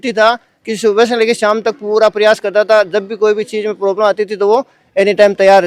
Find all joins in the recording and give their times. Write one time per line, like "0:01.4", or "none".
none